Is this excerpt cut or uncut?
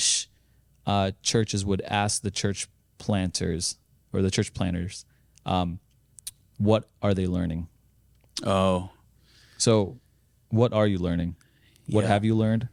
uncut